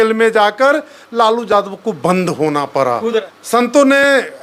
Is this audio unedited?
no; 1 cut; at 3.4 s

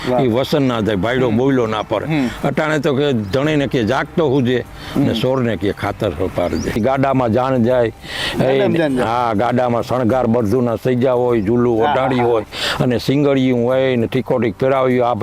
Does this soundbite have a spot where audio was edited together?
yes; 1 cut; at 6.8 s

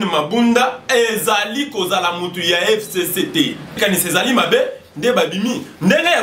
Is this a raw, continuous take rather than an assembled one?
no; 1 cut; at 3.8 s

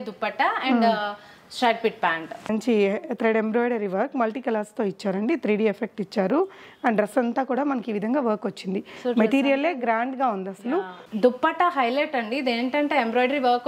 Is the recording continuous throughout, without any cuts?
no; 2 cuts; at 2.5 s, 11.0 s

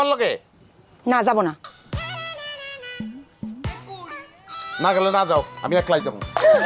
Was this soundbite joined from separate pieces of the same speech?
no; 0 cuts

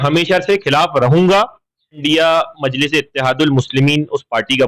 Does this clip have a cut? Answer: yes; 1 cut; at 2.0 s

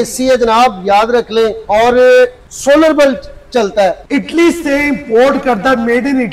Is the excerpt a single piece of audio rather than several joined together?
no; 3 cuts; at 1.6 s, 2.5 s, 4.0 s

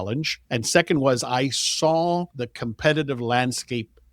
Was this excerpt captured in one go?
yes; 0 cuts

